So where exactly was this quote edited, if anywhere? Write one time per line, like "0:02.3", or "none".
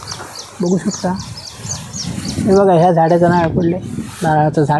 none